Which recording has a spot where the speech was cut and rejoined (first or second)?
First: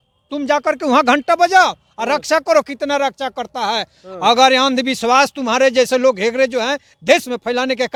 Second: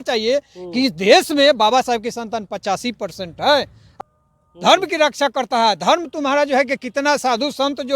second